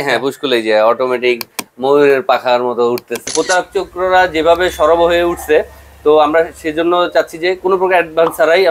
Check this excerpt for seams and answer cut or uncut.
cut